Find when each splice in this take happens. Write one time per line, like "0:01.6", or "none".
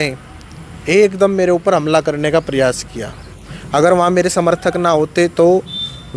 none